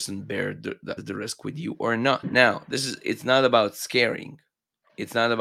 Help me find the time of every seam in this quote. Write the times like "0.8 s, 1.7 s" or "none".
1.0 s, 2.3 s